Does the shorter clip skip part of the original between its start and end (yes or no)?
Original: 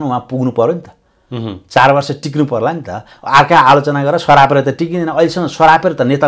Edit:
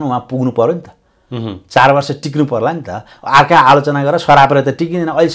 no